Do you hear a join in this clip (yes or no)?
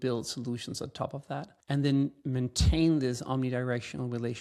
yes